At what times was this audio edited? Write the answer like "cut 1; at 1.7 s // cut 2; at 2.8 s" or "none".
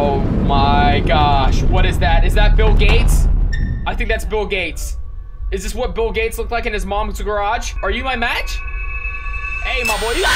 cut 1; at 7.7 s